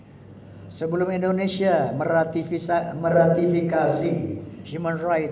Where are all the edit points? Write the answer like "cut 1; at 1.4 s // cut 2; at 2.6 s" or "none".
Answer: none